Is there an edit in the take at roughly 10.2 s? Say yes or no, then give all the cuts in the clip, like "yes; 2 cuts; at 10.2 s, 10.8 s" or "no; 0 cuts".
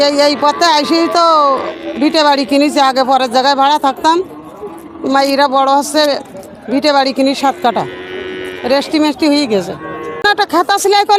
yes; 1 cut; at 10.2 s